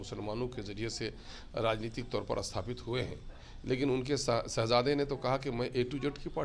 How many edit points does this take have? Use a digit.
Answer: 0